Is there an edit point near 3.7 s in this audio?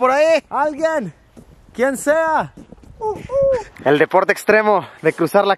yes; 1 cut; at 3.7 s

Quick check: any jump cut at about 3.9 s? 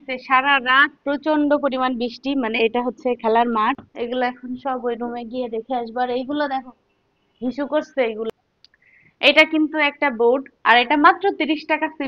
yes; 2 cuts; at 3.9 s, 8.3 s

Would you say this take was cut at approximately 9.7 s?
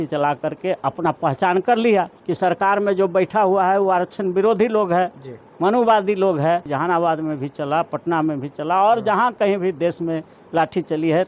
no; 2 cuts; at 2.2 s, 6.7 s

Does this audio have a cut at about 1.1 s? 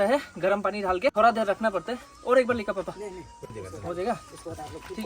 yes; 1 cut; at 1.1 s

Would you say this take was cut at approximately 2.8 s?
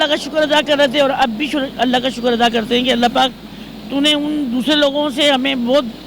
no; 0 cuts

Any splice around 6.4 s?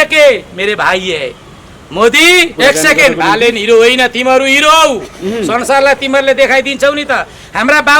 no; 1 cut; at 2.5 s

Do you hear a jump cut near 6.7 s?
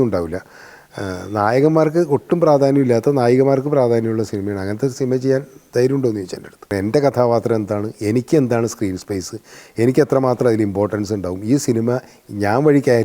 yes; 1 cut; at 6.7 s

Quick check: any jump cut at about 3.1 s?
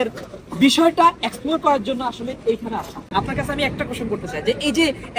yes; 1 cut; at 3.1 s

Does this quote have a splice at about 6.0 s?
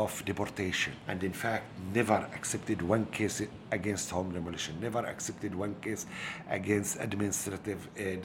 no; 1 cut; at 0.9 s

